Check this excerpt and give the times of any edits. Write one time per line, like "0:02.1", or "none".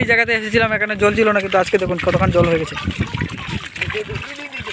none